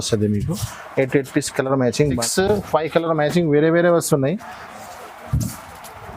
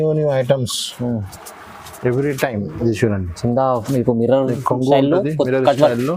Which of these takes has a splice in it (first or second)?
first